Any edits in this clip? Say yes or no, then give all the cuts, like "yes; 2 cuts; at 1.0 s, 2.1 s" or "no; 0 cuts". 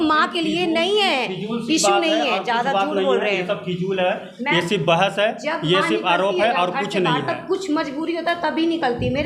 no; 0 cuts